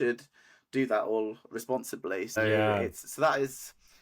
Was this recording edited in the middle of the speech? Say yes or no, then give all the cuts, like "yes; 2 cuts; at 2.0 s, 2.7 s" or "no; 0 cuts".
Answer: yes; 1 cut; at 2.4 s